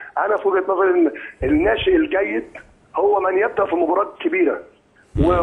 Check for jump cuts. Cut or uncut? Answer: uncut